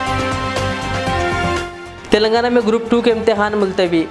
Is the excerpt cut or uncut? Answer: cut